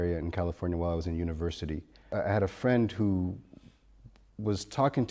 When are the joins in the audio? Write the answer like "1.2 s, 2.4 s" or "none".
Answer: 2.1 s